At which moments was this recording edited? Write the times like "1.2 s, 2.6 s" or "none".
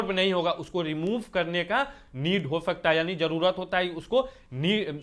none